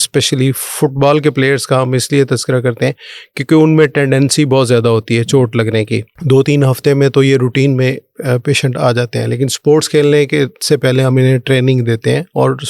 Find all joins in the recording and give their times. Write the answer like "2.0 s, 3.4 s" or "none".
6.1 s